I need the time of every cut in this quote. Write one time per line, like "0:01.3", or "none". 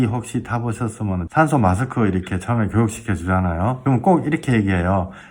0:01.2
0:03.8